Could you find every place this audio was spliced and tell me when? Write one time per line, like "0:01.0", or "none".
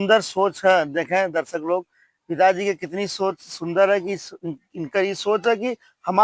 none